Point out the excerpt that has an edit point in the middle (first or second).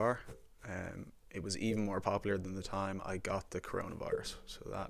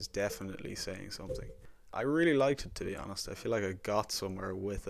second